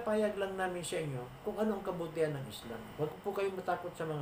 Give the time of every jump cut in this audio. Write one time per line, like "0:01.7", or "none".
0:02.8